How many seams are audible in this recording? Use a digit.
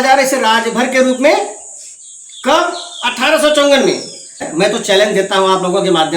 1